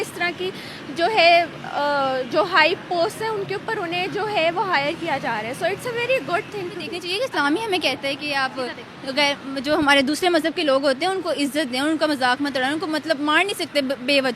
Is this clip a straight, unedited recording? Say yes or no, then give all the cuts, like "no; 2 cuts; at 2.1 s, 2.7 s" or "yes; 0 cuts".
no; 1 cut; at 7.0 s